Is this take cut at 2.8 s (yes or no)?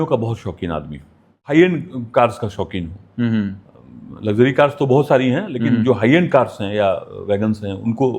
no